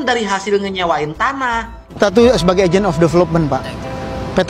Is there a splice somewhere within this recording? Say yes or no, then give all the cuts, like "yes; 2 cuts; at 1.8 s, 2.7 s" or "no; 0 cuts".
yes; 1 cut; at 2.0 s